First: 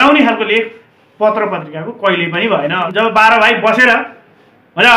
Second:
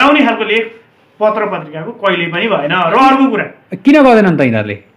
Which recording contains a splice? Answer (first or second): first